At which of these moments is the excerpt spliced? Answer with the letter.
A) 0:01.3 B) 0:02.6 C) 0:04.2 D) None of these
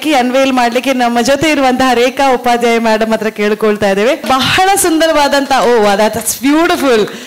C